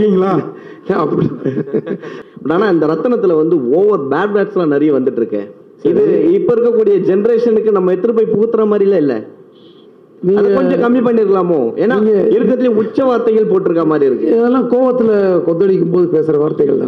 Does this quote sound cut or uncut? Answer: cut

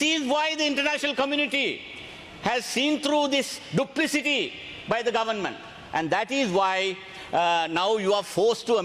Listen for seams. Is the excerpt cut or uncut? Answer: uncut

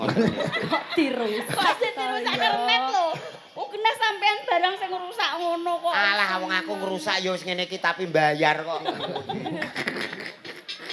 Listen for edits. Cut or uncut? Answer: cut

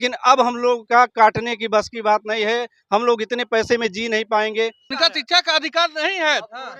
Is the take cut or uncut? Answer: cut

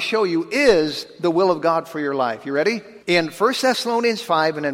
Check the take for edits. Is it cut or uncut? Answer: cut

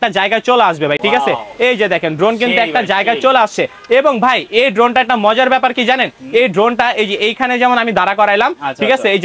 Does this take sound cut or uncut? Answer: uncut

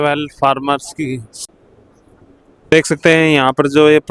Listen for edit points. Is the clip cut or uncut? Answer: cut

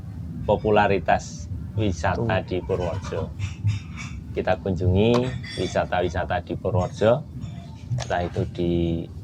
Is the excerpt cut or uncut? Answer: uncut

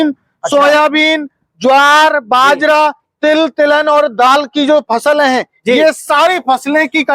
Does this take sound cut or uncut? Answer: uncut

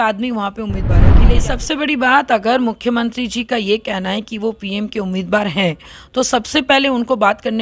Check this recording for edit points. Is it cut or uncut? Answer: cut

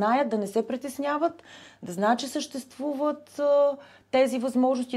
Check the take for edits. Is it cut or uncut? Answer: uncut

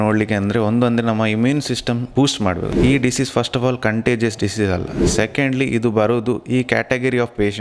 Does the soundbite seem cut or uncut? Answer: cut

